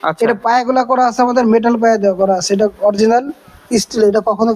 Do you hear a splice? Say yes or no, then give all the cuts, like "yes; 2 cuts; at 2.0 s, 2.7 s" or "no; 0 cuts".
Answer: no; 0 cuts